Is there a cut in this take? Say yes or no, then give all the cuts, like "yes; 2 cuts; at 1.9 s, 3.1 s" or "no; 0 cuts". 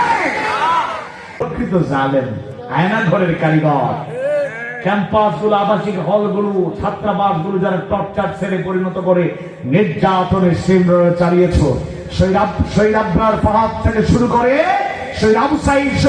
yes; 1 cut; at 1.4 s